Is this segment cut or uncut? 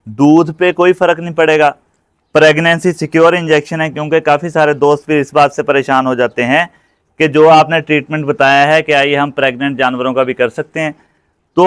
uncut